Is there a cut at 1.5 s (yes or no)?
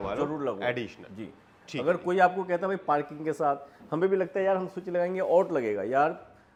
no